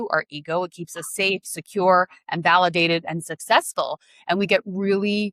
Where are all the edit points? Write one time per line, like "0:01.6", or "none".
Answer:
none